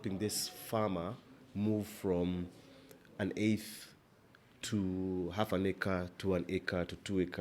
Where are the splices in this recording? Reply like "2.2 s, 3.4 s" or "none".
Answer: none